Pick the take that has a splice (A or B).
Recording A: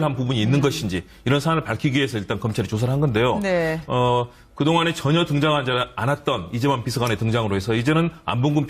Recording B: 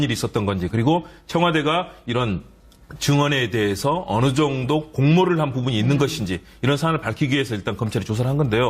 B